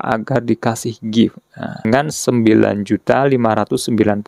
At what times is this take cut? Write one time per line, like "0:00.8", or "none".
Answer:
0:01.8